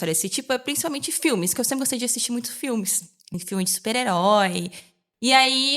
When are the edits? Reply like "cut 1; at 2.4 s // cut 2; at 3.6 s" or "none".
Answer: cut 1; at 3.4 s